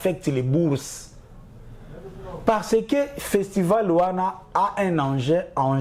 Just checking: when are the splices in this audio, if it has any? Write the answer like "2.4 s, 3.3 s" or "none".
none